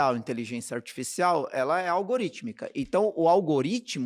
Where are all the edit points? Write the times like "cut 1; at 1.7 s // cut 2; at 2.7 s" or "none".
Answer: none